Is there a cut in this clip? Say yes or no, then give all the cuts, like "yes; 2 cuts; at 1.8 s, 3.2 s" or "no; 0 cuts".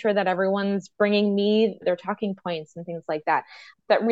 yes; 1 cut; at 1.8 s